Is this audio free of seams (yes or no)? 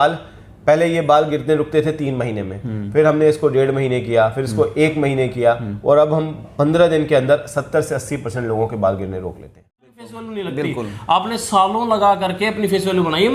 no